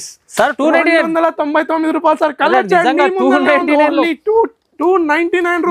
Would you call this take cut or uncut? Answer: uncut